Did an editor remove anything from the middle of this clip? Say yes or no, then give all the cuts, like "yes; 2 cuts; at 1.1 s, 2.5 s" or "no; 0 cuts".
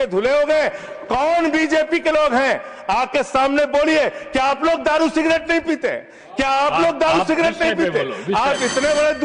no; 0 cuts